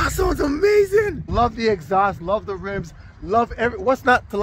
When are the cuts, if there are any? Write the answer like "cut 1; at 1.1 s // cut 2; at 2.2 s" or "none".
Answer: cut 1; at 1.3 s